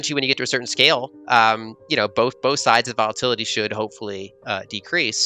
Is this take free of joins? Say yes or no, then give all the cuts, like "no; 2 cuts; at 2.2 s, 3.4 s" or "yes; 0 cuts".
yes; 0 cuts